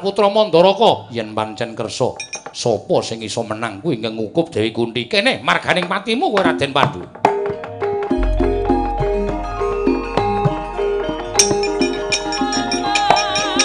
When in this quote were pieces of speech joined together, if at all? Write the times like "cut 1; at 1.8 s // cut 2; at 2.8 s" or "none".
none

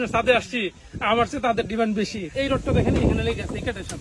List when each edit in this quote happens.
cut 1; at 2.3 s

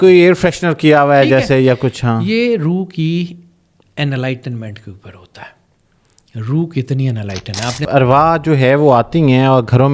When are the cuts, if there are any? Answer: cut 1; at 7.8 s

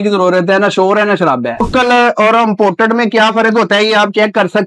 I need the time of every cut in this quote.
cut 1; at 1.7 s

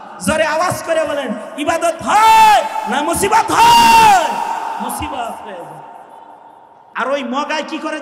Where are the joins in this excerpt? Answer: cut 1; at 6.8 s

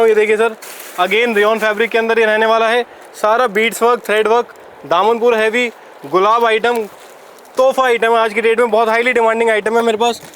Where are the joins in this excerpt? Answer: none

